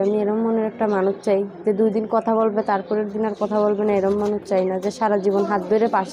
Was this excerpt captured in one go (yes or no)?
yes